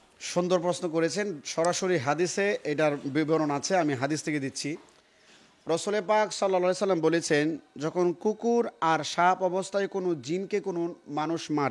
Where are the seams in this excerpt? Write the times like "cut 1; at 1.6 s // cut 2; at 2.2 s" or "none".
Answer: none

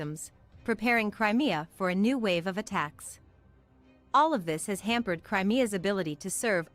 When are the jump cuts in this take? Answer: none

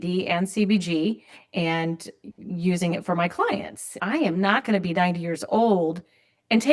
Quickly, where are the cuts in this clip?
cut 1; at 4.0 s

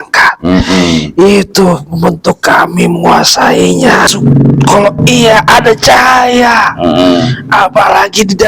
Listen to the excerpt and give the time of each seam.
cut 1; at 4.0 s

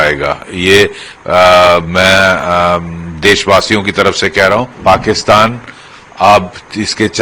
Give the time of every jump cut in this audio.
cut 1; at 4.7 s

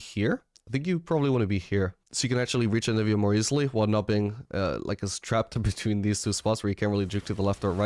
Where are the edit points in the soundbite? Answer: cut 1; at 2.1 s

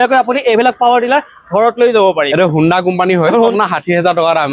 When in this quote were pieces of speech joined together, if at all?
cut 1; at 2.3 s // cut 2; at 3.5 s

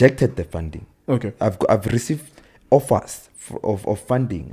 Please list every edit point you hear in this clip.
none

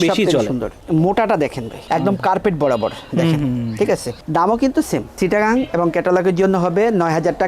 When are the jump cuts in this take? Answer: none

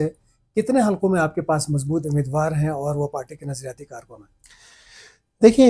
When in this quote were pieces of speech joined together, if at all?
none

